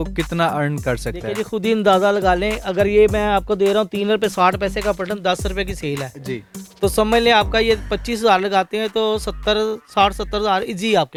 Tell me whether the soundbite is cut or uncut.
uncut